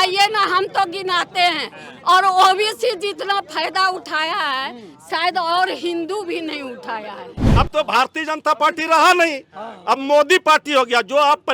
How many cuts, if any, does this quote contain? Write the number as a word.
one